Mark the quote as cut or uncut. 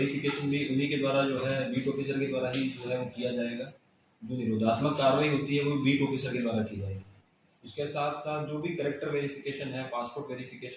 uncut